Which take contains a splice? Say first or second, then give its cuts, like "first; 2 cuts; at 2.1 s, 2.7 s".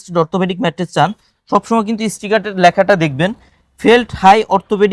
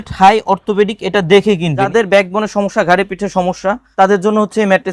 second; 2 cuts; at 1.9 s, 3.8 s